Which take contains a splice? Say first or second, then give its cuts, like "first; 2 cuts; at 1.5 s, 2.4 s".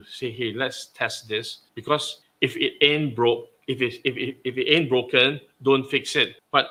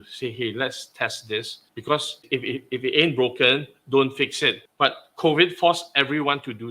second; 1 cut; at 2.2 s